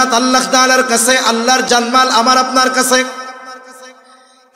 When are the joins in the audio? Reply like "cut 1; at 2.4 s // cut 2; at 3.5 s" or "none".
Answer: cut 1; at 1.6 s

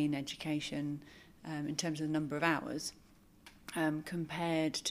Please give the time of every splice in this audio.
none

